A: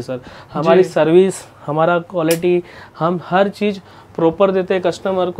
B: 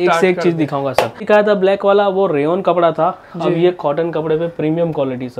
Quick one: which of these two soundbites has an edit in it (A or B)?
B